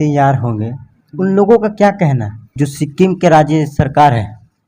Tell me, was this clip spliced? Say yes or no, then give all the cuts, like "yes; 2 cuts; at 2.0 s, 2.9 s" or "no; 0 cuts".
yes; 1 cut; at 2.4 s